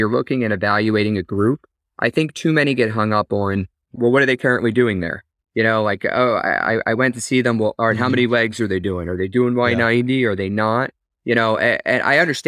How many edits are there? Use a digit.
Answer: 1